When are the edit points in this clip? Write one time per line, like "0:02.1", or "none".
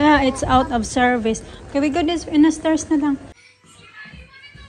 0:03.3